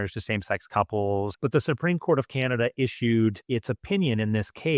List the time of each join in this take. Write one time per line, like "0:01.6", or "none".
0:01.3